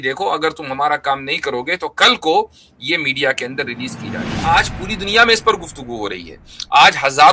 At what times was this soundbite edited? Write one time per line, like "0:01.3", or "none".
0:04.4